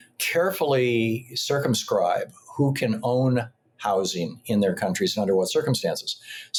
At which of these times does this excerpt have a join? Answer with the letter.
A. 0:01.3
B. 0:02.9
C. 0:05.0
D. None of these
D